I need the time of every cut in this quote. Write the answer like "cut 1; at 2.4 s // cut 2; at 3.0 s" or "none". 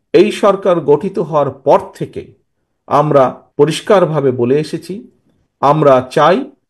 cut 1; at 3.4 s